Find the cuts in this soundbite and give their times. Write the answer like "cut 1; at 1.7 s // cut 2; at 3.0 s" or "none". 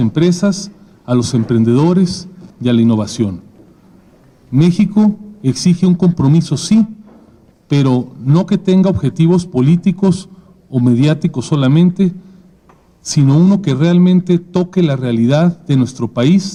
none